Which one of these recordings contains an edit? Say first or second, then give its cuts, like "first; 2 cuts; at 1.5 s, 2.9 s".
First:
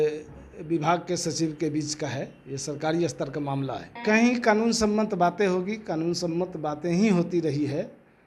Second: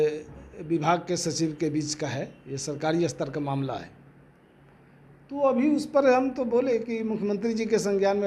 first; 1 cut; at 3.9 s